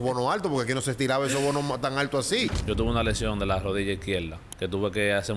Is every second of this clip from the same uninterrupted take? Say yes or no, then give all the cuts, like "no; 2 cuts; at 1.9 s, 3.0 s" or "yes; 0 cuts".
no; 2 cuts; at 2.5 s, 4.4 s